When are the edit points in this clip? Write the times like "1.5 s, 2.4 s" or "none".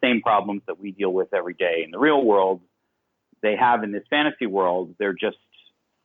none